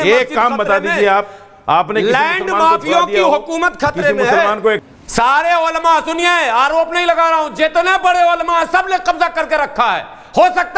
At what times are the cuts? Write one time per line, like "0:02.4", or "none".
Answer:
0:04.8

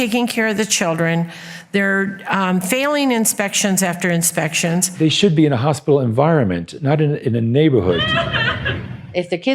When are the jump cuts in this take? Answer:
0:04.9
0:08.1

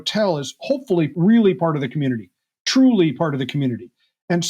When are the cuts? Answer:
0:01.1

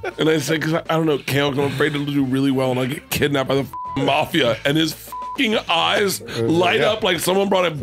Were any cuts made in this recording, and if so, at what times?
none

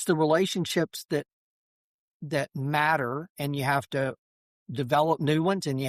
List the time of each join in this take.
none

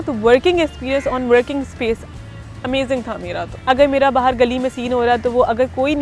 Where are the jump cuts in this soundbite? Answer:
0:03.5

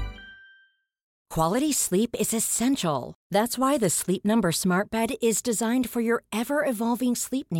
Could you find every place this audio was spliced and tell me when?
0:01.1

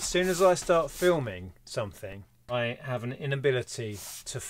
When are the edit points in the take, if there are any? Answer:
0:02.5

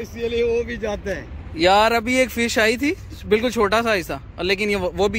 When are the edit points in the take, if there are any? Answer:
none

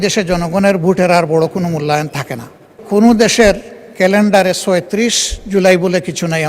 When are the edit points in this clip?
0:02.8

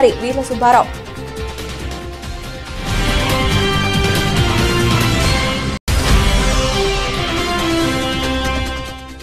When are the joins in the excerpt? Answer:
0:00.9
0:05.8

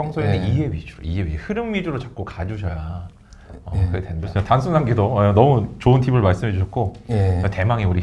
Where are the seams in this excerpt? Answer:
none

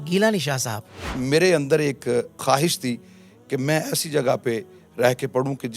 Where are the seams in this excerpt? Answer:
0:01.1
0:02.4

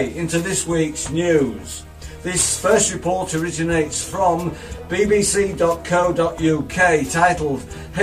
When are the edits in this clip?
0:01.3

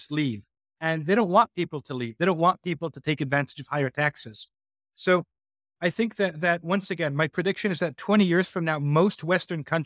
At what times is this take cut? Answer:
none

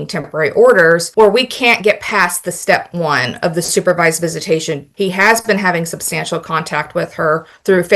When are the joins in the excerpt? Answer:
0:01.1
0:04.9

